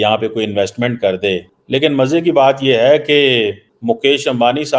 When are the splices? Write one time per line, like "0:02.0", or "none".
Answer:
0:01.5
0:03.7